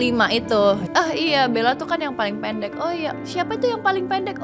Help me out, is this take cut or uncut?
cut